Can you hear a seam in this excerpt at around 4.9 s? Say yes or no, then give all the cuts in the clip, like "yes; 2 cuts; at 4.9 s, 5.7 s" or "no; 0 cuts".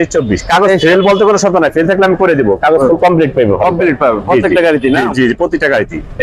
no; 0 cuts